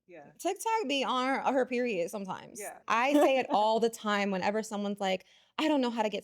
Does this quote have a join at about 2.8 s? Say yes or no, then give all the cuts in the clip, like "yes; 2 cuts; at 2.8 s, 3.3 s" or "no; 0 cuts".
yes; 1 cut; at 2.8 s